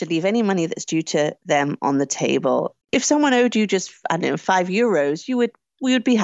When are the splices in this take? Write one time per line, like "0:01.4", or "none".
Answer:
0:02.8